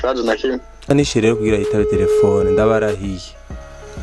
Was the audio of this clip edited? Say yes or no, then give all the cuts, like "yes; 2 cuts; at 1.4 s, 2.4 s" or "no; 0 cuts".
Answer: yes; 1 cut; at 0.9 s